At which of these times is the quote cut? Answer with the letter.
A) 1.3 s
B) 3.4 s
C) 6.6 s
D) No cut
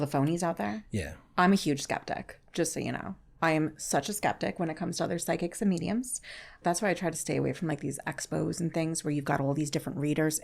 C